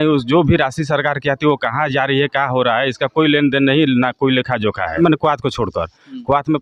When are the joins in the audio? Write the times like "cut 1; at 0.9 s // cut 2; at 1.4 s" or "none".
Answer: cut 1; at 5.0 s